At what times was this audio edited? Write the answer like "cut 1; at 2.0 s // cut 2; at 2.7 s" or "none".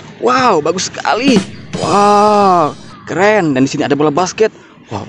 none

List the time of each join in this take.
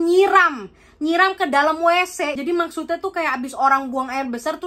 none

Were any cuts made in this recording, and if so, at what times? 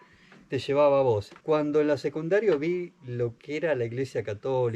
cut 1; at 1.3 s

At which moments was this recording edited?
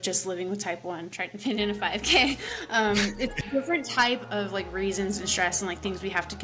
cut 1; at 3.3 s

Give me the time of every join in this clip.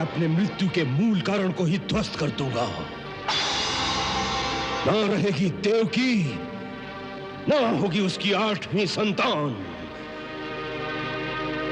none

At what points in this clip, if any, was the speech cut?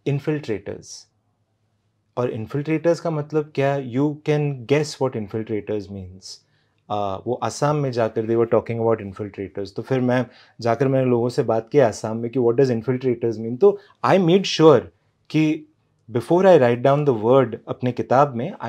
none

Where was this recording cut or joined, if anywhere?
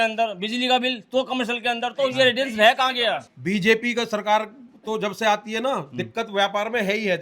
cut 1; at 3.3 s

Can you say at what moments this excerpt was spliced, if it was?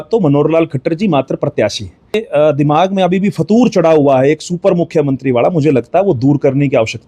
cut 1; at 2.2 s

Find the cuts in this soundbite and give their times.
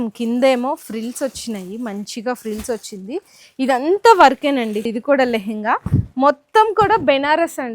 cut 1; at 4.9 s

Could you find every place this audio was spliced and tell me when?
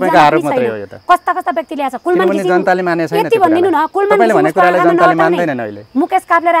none

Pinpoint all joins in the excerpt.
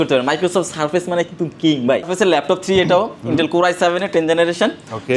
cut 1; at 2.1 s

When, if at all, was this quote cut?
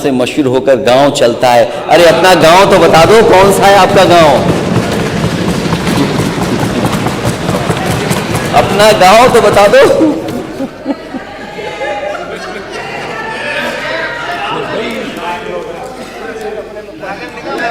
none

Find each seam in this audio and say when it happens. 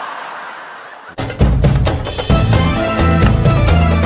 cut 1; at 1.1 s

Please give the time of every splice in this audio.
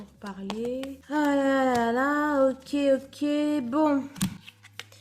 none

